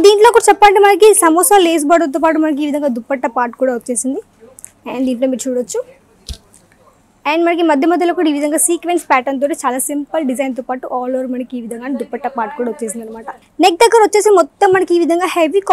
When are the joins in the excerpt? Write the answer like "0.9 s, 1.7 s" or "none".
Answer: 13.4 s